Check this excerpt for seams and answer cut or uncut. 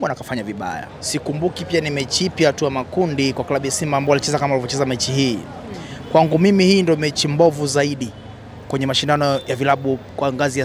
cut